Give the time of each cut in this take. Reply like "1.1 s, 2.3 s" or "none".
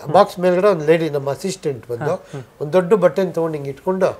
none